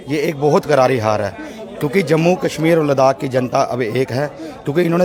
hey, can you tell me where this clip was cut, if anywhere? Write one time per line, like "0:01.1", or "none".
none